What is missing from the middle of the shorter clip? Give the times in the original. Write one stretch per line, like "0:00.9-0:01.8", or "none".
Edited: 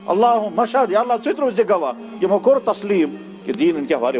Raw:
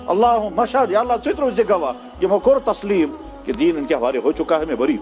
none